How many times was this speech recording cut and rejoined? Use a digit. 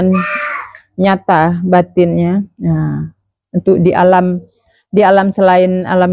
0